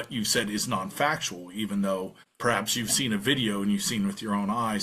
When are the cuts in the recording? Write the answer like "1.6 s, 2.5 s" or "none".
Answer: 2.2 s